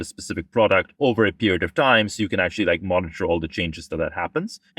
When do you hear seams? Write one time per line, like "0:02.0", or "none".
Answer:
0:00.9